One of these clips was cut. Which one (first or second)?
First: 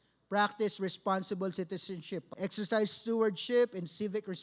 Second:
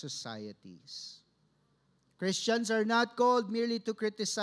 first